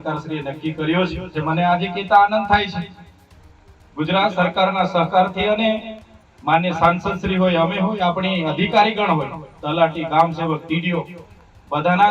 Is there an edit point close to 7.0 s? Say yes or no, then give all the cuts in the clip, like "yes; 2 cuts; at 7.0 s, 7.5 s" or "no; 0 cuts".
no; 1 cut; at 1.4 s